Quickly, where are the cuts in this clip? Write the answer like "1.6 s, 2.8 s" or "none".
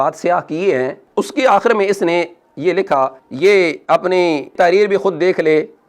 3.2 s